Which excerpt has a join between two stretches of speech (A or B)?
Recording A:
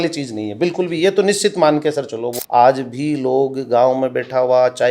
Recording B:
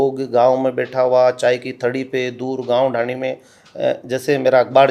A